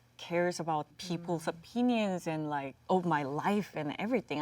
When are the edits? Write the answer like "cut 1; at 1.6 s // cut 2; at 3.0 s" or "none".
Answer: cut 1; at 0.9 s // cut 2; at 2.7 s